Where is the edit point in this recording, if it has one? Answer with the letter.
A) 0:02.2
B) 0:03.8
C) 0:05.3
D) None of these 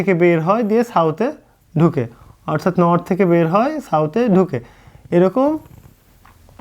D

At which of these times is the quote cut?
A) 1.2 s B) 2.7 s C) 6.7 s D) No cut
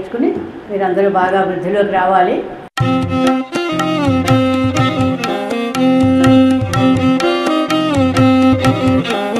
B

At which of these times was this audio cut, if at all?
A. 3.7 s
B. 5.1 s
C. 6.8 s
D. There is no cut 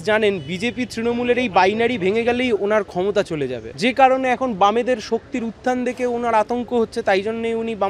A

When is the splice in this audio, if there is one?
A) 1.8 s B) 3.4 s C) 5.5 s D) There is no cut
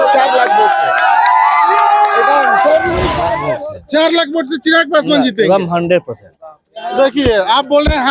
B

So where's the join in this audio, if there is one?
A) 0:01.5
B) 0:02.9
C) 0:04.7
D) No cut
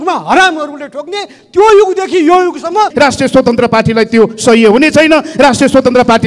B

